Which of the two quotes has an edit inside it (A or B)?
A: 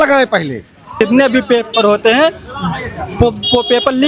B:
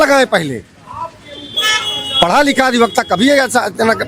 A